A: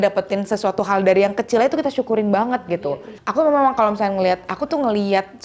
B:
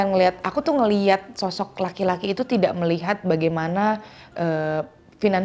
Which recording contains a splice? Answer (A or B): A